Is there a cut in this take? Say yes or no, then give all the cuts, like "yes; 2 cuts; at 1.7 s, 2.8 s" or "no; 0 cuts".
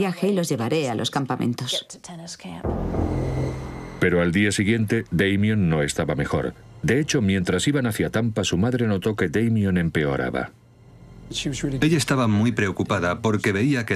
yes; 1 cut; at 7.1 s